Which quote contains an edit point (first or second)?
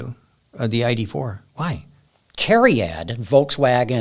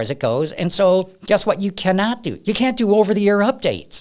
first